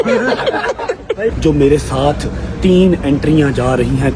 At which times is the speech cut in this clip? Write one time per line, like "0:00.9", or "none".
0:01.4